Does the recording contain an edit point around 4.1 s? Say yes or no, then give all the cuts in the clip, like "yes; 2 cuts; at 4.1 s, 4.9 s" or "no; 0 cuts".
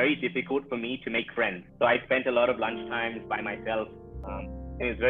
yes; 1 cut; at 4.1 s